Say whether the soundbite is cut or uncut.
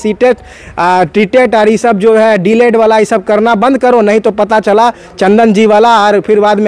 uncut